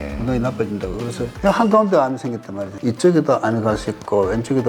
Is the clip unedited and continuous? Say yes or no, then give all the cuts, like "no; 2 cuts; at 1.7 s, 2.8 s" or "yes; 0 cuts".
no; 1 cut; at 1.3 s